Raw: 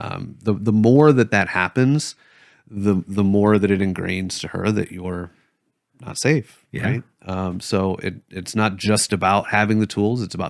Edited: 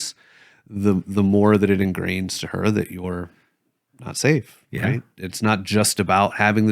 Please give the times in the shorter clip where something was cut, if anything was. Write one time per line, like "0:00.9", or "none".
0:05.1